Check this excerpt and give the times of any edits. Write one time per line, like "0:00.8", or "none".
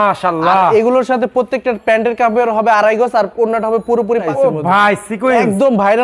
0:04.3